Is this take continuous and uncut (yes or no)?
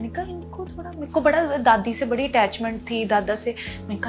yes